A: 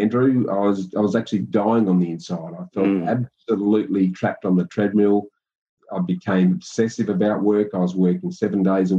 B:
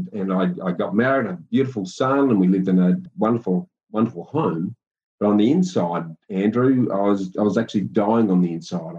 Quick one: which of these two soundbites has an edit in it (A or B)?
B